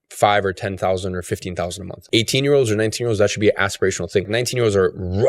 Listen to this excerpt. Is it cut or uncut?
cut